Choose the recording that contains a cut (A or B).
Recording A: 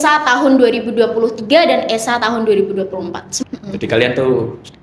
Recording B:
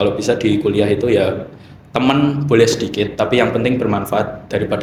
A